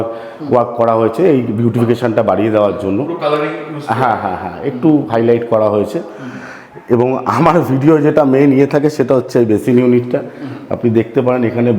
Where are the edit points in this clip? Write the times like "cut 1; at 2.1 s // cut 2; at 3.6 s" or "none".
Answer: none